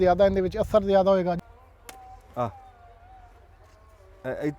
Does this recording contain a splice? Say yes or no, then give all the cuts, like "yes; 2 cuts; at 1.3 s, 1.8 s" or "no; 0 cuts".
yes; 1 cut; at 1.4 s